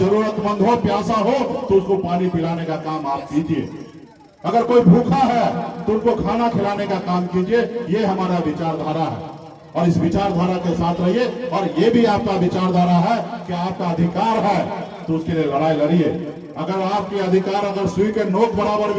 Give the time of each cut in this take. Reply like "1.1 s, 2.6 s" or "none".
none